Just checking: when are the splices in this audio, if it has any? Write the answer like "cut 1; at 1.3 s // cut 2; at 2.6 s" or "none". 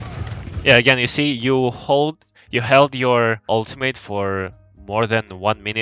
none

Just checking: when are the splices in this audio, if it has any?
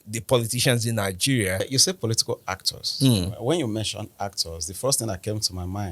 cut 1; at 1.7 s

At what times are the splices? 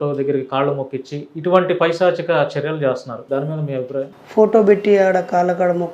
cut 1; at 3.1 s // cut 2; at 4.2 s

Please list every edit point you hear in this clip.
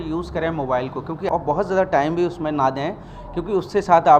cut 1; at 1.3 s

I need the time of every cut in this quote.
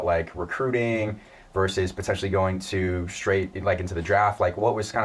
none

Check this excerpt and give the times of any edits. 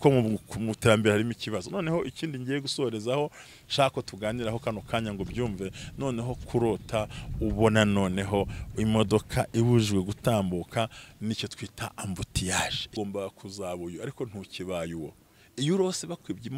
cut 1; at 12.9 s

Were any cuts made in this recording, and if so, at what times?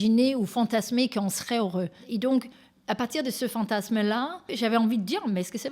cut 1; at 2.0 s // cut 2; at 4.5 s

